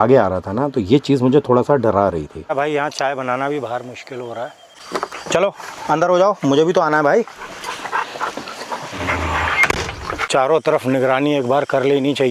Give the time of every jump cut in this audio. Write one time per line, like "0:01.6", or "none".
0:02.5
0:04.8
0:10.3